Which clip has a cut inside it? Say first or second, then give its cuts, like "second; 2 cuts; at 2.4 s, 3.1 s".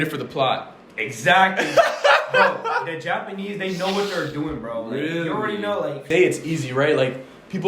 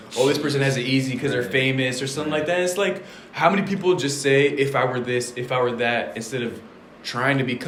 first; 1 cut; at 6.1 s